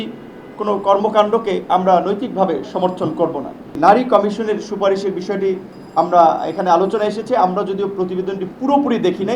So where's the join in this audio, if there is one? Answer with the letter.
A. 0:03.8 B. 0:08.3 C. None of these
A